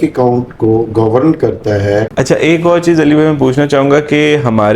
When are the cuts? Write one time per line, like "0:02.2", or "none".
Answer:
0:02.1

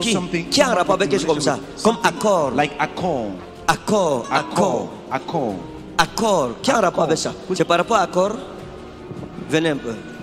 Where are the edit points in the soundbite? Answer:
0:07.4

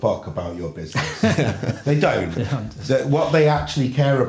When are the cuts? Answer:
none

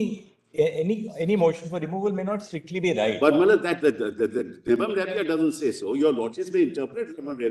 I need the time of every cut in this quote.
none

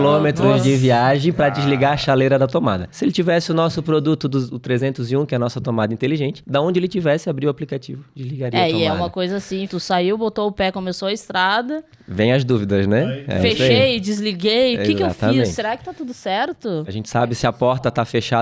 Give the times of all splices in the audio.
0:02.9
0:06.4
0:09.7
0:16.8

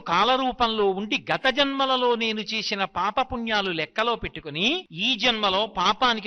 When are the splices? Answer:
0:04.9

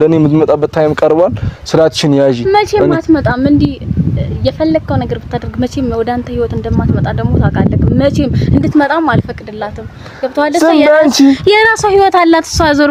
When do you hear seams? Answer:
none

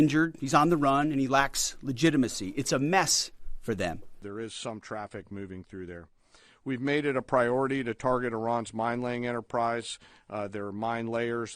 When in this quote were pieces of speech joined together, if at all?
0:04.2

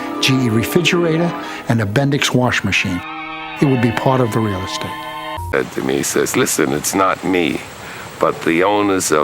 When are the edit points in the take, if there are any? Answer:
0:05.5

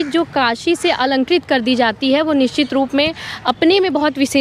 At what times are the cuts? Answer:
none

